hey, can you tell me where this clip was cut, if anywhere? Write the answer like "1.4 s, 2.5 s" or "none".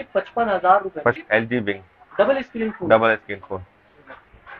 1.2 s